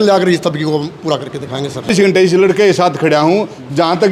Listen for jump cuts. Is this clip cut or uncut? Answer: cut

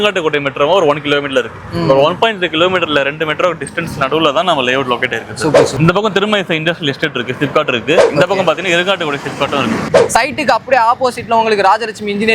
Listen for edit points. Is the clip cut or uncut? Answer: cut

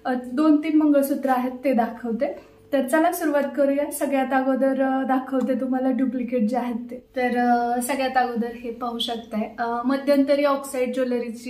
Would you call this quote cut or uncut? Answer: uncut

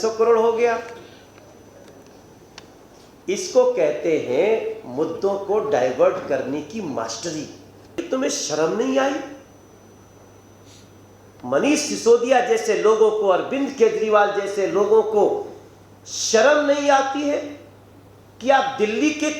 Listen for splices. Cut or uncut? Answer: cut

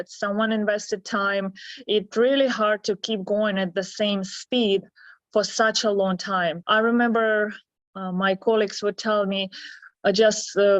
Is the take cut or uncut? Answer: uncut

